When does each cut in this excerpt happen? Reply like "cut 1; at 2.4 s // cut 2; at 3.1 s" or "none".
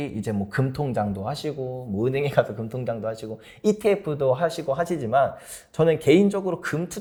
none